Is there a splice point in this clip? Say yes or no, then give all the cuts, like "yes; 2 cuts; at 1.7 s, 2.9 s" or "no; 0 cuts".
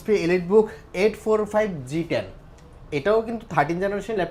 no; 0 cuts